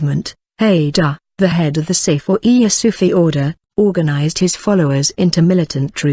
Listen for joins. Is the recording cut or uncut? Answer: cut